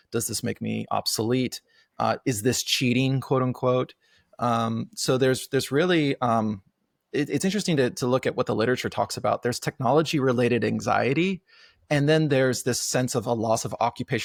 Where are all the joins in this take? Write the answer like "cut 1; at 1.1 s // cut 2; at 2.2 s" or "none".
none

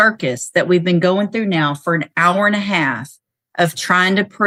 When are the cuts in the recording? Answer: none

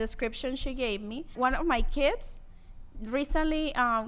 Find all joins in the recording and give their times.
cut 1; at 1.3 s

